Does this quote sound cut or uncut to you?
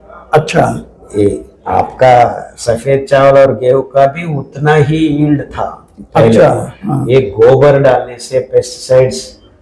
uncut